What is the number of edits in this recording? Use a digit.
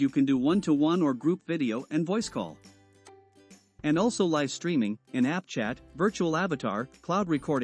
0